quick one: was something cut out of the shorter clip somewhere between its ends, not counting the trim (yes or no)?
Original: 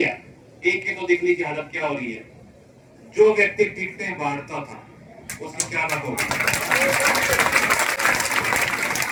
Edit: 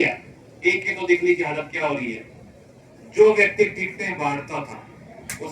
no